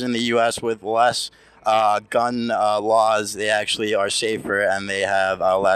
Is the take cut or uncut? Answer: uncut